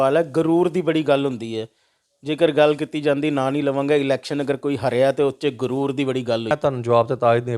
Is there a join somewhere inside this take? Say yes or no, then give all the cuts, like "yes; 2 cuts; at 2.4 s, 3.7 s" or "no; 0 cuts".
yes; 1 cut; at 6.5 s